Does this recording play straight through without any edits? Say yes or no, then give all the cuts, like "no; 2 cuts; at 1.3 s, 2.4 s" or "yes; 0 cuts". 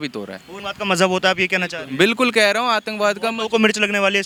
yes; 0 cuts